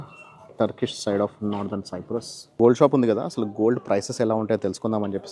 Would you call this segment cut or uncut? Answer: cut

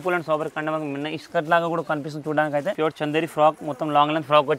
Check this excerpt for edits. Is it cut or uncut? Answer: cut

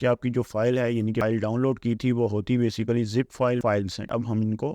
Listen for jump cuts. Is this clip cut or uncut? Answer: cut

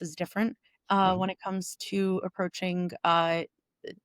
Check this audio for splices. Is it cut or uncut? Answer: uncut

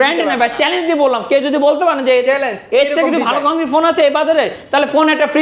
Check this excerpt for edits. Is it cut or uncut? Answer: uncut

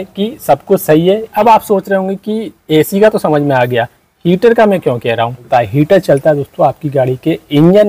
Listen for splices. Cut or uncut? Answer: cut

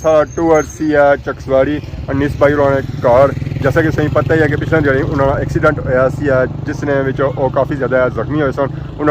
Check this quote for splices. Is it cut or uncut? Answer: uncut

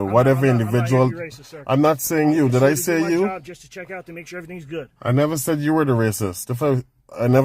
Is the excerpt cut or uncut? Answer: uncut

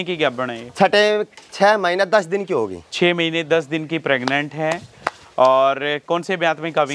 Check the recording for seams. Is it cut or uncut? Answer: uncut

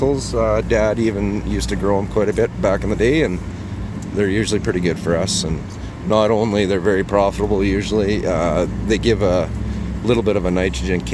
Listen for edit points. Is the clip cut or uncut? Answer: uncut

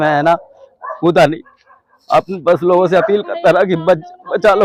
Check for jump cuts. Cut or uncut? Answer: uncut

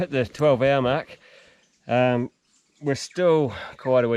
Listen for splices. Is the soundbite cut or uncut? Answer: uncut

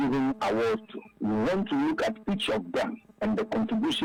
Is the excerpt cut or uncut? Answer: uncut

